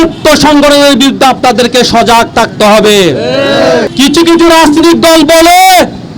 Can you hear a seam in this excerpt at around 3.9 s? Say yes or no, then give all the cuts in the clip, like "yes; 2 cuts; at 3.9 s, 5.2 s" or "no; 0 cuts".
yes; 1 cut; at 3.9 s